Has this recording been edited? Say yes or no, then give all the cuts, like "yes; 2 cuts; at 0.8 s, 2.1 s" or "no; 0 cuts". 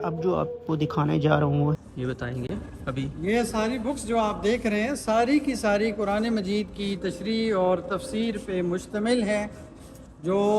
yes; 1 cut; at 1.8 s